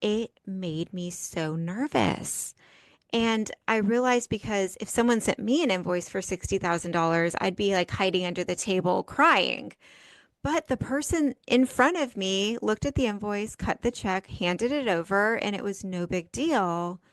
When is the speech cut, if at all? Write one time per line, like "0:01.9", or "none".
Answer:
none